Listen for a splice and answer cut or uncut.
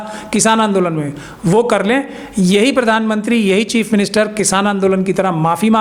uncut